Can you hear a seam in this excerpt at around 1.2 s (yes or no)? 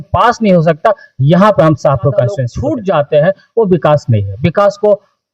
no